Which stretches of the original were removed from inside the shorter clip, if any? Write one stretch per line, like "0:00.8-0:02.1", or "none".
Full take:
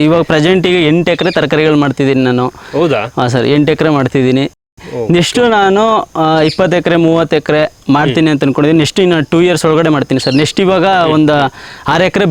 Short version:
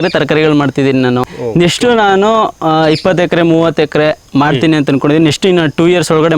0:02.6-0:04.9